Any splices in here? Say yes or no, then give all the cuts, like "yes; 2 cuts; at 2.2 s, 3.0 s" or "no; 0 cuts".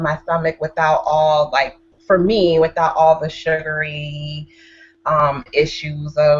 no; 0 cuts